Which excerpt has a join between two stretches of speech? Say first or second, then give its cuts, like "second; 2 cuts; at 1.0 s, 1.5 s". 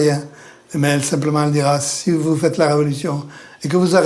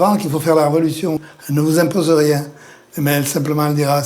second; 1 cut; at 1.2 s